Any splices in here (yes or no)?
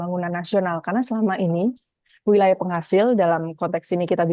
no